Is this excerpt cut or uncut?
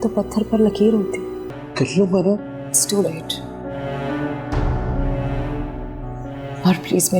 cut